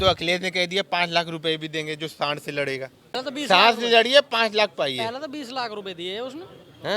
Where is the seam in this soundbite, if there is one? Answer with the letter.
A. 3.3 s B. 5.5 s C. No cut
A